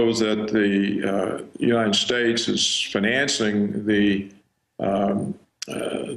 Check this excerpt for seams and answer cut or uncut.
uncut